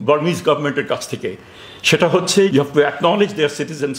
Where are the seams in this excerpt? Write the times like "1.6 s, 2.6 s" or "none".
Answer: 2.5 s